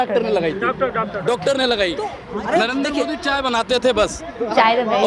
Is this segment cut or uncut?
cut